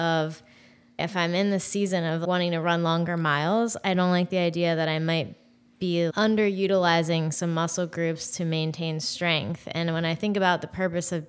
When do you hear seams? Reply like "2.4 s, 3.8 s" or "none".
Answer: 1.0 s, 2.2 s, 6.1 s